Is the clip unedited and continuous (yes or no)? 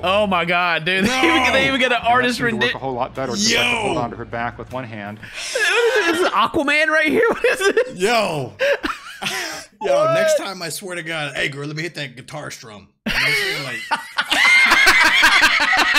yes